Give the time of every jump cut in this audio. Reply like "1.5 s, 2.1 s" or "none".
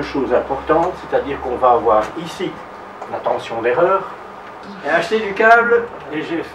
4.7 s